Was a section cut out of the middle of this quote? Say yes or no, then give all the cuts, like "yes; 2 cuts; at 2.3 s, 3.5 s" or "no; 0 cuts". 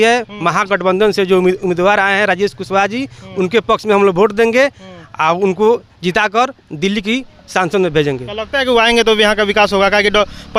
no; 0 cuts